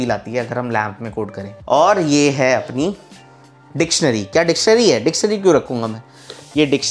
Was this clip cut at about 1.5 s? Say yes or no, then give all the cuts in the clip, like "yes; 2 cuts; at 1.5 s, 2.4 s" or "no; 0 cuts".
yes; 2 cuts; at 1.5 s, 4.2 s